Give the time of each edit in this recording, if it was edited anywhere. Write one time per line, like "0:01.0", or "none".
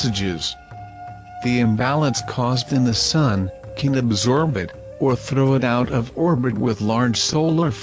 none